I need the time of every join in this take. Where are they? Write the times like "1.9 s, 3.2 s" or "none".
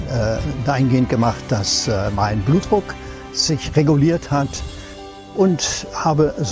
5.0 s